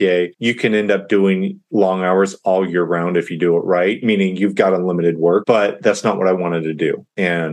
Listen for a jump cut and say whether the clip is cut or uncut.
cut